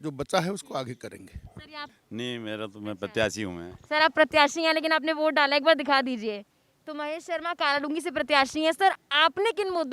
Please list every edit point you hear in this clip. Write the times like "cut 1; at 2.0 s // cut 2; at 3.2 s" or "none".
cut 1; at 1.9 s